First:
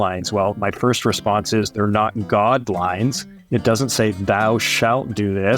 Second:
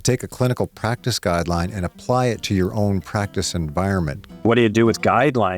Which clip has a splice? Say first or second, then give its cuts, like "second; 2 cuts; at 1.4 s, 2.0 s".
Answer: second; 1 cut; at 4.4 s